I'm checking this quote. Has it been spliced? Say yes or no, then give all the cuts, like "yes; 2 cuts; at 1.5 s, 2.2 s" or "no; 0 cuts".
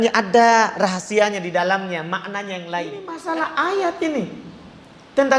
yes; 1 cut; at 3.1 s